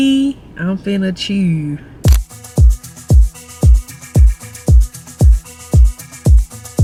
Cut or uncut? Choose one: uncut